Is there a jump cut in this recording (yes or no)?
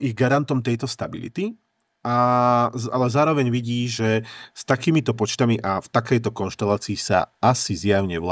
no